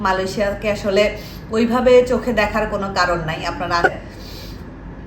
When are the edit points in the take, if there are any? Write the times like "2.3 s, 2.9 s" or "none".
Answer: 3.9 s